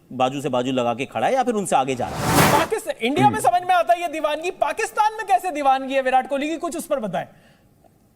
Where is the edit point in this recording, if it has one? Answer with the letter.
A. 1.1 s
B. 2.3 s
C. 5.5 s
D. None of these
B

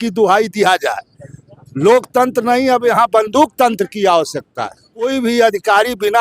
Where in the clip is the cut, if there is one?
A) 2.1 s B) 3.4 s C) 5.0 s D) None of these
C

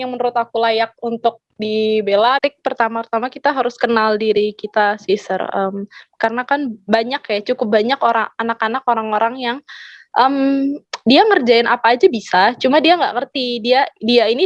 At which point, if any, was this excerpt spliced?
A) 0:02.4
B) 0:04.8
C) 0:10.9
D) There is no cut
A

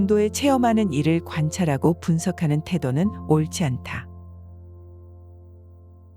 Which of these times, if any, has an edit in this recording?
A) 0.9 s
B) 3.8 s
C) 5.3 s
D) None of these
B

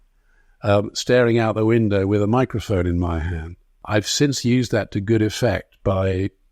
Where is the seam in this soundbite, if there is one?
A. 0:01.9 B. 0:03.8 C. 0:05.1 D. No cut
B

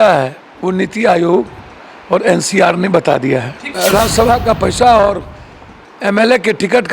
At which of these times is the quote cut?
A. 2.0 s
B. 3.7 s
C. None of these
B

